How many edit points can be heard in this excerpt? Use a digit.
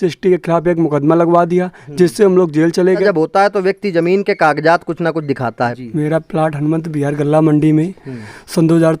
2